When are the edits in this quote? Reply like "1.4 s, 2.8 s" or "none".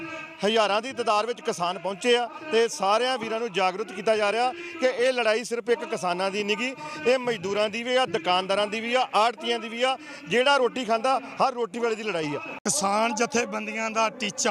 12.6 s

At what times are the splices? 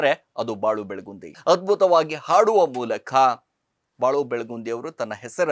1.4 s

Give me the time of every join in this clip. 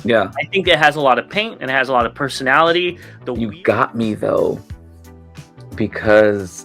3.1 s

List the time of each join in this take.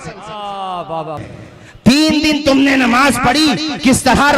1.2 s

